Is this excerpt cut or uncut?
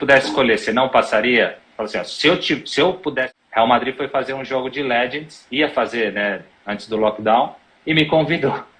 cut